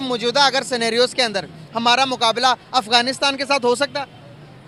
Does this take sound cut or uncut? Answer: uncut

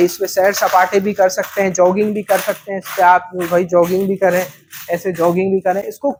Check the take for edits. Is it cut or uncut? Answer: uncut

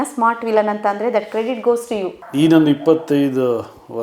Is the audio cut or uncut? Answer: cut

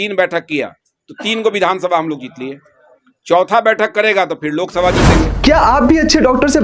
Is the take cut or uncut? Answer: cut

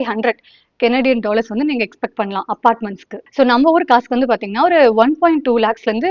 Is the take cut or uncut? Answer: uncut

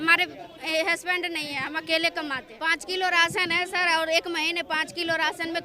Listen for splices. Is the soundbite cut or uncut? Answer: cut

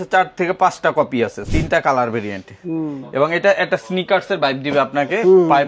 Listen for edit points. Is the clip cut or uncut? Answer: cut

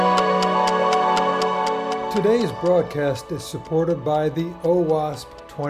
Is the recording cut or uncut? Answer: cut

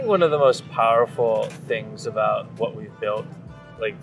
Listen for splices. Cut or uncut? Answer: uncut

